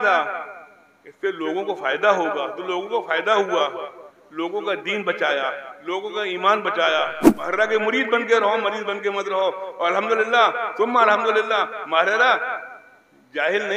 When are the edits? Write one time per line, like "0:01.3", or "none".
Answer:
0:07.3